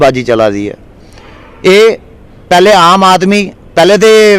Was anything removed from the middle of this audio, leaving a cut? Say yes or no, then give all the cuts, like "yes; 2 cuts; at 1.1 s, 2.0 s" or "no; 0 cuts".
no; 0 cuts